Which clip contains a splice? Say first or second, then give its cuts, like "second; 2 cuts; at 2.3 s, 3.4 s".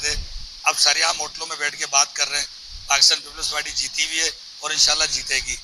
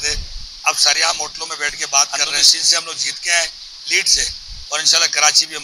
second; 1 cut; at 2.1 s